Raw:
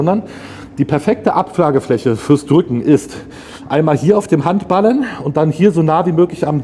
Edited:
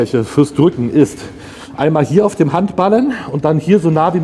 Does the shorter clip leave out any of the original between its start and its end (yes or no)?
no